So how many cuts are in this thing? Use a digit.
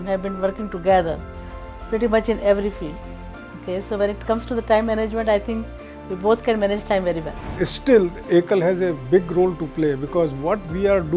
1